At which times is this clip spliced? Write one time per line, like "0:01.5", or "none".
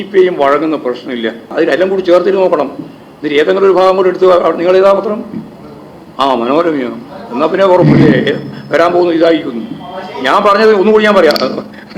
0:01.5